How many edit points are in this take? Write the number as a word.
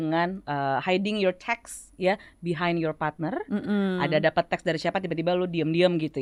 zero